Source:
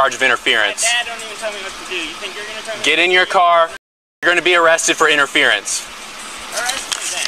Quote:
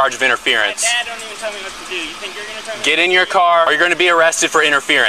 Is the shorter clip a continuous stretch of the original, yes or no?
no